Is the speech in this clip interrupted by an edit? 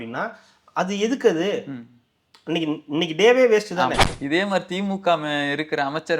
yes; 1 cut; at 4.1 s

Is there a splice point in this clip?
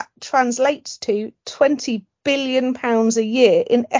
no; 0 cuts

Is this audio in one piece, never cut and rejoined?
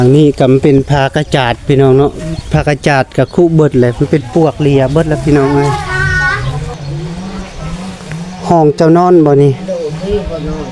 no; 1 cut; at 6.8 s

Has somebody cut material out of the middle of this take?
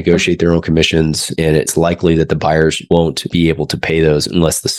yes; 2 cuts; at 1.6 s, 3.1 s

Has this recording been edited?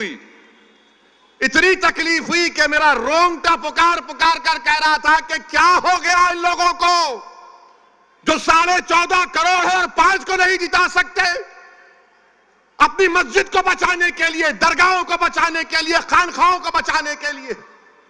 no; 0 cuts

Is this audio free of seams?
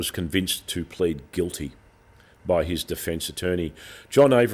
yes; 0 cuts

